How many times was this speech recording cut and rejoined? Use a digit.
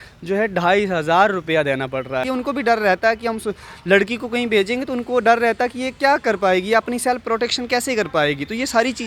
1